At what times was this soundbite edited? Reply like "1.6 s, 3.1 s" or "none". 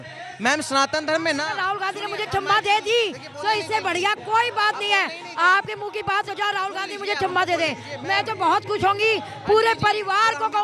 none